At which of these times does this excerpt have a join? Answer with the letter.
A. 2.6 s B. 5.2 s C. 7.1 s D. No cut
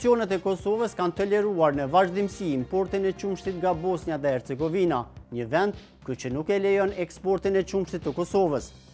D